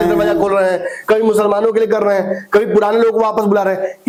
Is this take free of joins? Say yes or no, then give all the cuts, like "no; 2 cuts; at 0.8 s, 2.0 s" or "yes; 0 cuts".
yes; 0 cuts